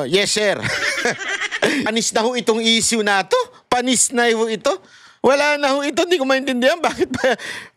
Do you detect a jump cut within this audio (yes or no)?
yes